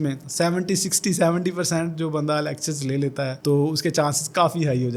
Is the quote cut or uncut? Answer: uncut